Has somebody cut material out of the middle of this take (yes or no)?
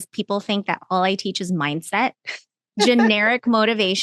yes